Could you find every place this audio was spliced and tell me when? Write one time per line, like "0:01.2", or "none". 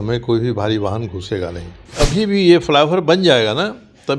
0:01.9